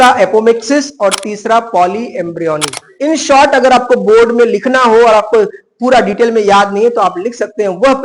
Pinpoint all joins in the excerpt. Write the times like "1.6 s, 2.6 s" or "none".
2.8 s